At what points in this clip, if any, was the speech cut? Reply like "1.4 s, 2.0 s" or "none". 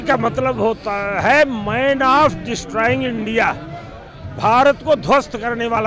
none

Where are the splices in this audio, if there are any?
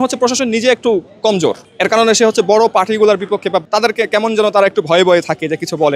1.7 s, 3.6 s

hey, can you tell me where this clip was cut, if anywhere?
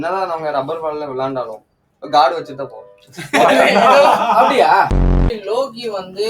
5.3 s

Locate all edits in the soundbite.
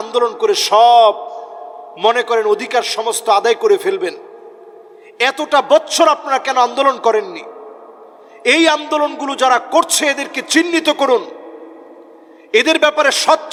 none

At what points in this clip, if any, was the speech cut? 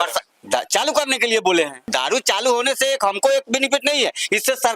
1.8 s

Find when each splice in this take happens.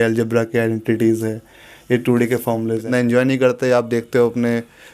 2.8 s

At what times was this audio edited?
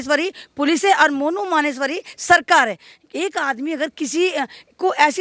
none

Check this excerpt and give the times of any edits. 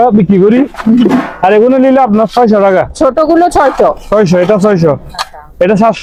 none

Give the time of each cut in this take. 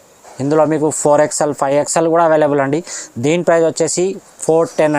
none

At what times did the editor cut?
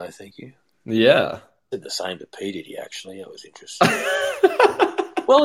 none

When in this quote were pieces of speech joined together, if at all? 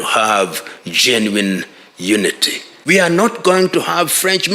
2.7 s

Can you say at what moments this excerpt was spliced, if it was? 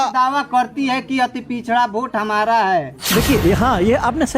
3.0 s

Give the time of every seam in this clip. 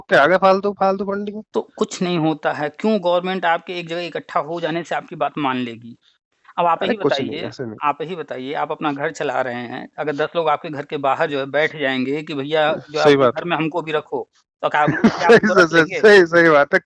none

